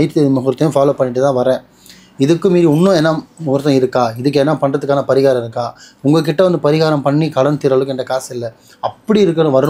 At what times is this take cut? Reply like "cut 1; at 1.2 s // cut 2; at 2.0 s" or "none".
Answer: none